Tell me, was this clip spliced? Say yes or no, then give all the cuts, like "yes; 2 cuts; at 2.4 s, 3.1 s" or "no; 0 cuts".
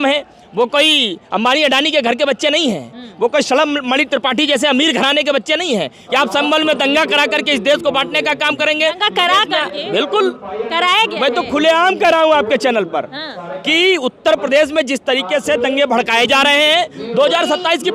yes; 1 cut; at 6.0 s